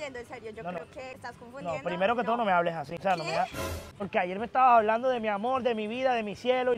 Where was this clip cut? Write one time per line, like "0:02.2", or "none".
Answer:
0:01.2
0:03.9

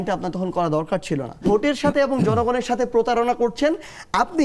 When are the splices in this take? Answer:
0:01.3

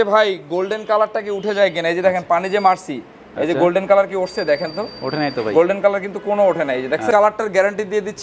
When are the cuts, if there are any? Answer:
0:07.1

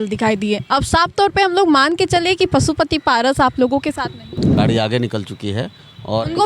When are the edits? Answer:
0:04.5

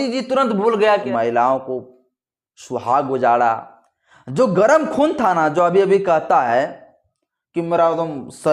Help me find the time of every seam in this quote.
0:01.0

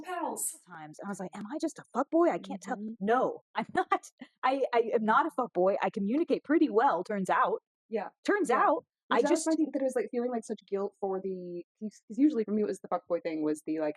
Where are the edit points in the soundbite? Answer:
0:01.0

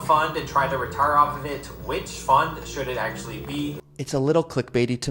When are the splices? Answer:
0:03.8

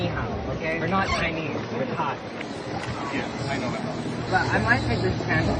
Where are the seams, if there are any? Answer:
0:00.8
0:02.4

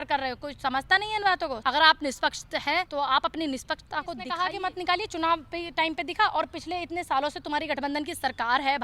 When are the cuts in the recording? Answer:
0:01.6
0:02.9
0:04.3

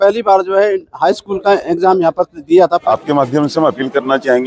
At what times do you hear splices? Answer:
0:02.8

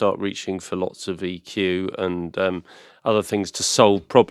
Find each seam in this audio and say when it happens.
none

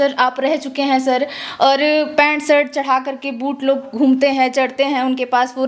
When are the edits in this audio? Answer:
none

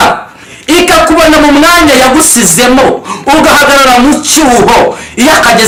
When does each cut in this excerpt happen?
none

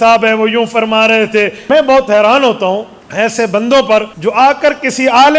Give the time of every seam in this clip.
0:01.7
0:03.0
0:04.1

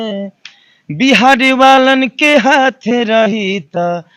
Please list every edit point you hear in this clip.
none

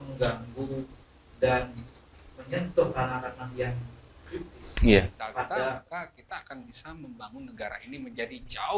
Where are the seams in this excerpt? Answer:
0:05.7

